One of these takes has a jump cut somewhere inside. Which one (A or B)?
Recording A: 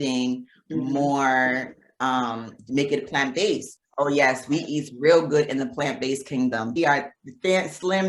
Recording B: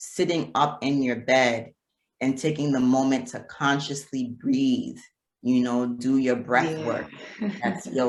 A